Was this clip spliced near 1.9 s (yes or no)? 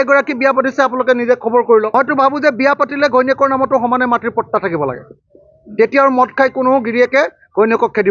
yes